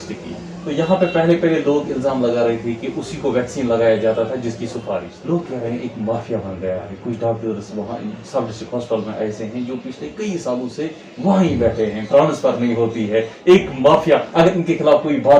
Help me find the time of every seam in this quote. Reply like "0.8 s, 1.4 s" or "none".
5.1 s